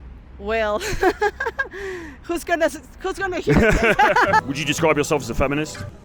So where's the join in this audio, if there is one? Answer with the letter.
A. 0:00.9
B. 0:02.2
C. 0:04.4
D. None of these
C